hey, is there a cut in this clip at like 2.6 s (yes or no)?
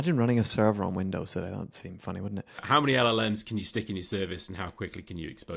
yes